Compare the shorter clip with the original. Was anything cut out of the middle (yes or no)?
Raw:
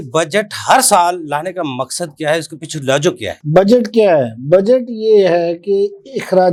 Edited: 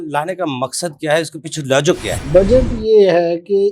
yes